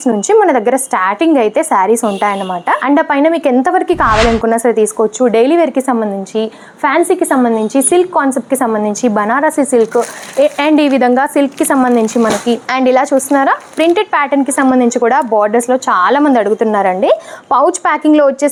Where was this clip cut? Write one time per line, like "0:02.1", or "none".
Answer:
none

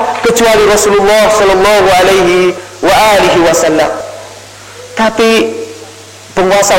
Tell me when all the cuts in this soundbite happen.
0:02.7
0:04.1

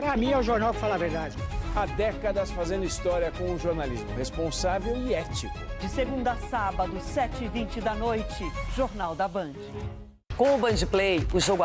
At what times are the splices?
0:09.6

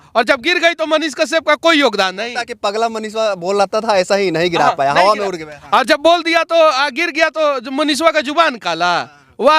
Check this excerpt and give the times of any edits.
none

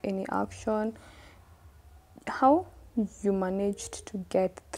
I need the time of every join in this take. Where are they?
0:01.3

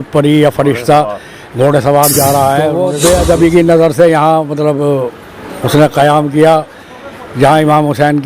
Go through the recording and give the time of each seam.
0:02.8

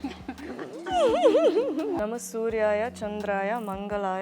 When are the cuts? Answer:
0:02.0

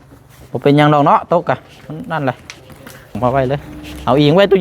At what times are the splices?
0:03.2

